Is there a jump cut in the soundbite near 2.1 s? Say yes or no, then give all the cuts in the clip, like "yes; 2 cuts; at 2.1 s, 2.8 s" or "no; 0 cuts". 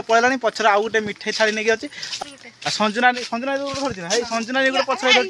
yes; 1 cut; at 2.1 s